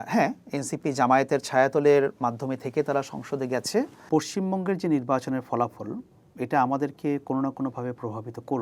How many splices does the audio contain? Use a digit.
1